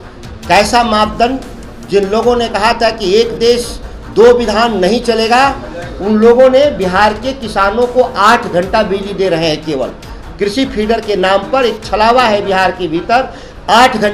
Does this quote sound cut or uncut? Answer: uncut